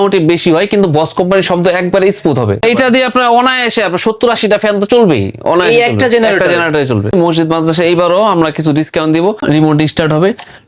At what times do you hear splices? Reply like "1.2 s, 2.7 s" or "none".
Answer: 2.6 s, 7.1 s, 9.4 s